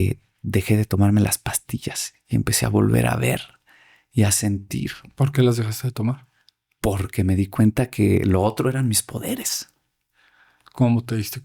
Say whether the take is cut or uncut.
uncut